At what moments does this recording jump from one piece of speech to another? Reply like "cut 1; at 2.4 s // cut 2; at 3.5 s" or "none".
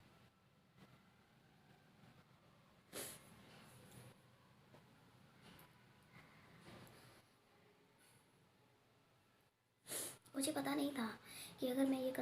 cut 1; at 10.3 s

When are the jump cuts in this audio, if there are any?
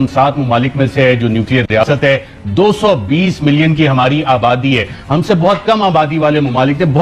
none

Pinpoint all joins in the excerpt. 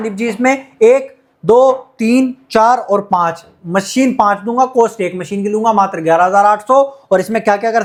none

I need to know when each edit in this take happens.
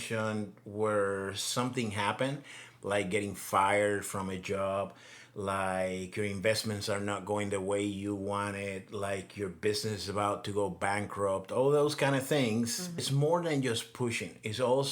cut 1; at 13.0 s

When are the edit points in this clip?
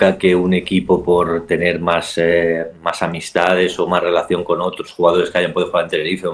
none

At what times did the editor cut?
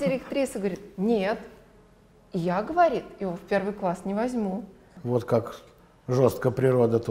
cut 1; at 4.9 s

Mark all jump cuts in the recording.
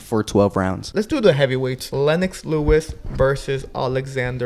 cut 1; at 1.0 s // cut 2; at 1.8 s

